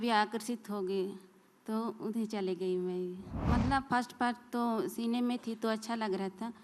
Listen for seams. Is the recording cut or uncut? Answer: cut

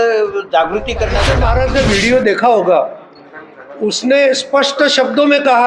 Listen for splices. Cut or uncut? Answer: cut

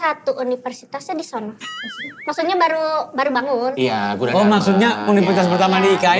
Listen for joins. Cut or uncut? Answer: uncut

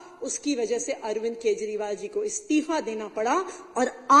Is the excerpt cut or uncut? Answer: uncut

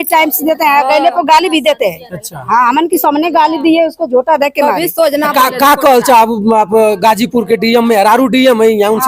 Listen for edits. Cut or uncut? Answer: uncut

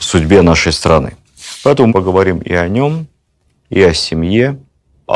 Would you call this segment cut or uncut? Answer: cut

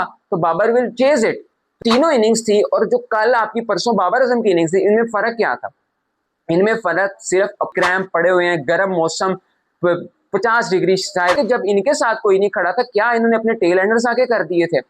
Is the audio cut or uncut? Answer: cut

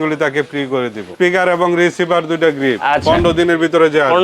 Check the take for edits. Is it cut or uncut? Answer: cut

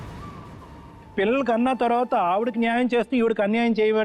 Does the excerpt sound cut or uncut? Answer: cut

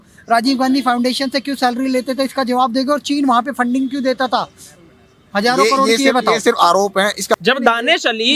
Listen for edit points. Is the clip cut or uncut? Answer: cut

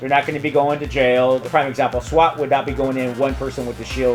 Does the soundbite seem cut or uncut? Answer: cut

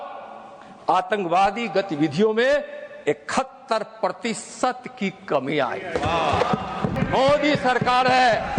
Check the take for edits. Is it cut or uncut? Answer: cut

